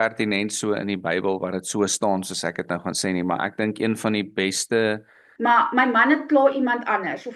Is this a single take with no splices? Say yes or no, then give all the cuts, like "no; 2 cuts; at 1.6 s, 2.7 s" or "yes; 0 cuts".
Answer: no; 1 cut; at 5.2 s